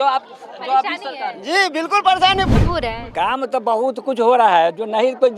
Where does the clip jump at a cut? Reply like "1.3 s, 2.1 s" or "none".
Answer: 2.5 s